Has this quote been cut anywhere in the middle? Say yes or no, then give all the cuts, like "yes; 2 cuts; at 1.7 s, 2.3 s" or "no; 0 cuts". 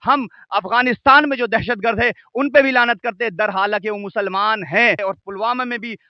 yes; 1 cut; at 5.0 s